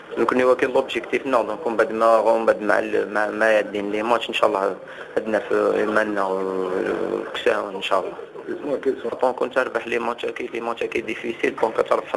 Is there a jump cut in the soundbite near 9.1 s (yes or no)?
yes